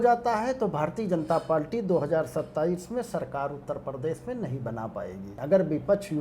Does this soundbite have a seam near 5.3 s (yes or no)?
yes